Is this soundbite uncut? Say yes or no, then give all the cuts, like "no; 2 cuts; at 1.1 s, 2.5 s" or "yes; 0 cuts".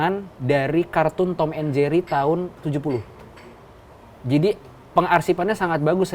yes; 0 cuts